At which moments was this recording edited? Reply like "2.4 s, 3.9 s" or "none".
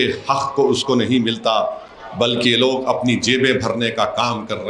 none